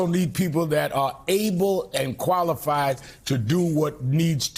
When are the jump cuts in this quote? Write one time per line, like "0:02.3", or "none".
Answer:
none